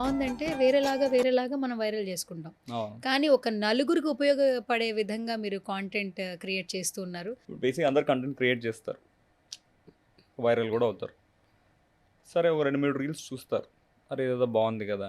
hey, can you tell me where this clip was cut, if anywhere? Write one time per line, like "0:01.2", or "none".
0:07.4